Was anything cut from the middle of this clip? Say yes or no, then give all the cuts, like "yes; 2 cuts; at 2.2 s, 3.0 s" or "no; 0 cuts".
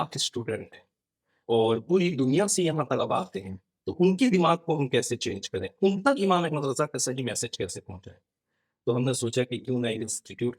no; 0 cuts